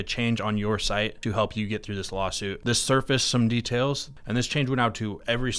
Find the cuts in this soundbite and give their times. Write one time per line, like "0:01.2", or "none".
0:01.2
0:02.6
0:04.1